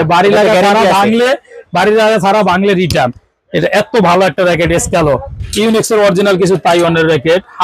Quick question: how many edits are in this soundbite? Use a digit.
1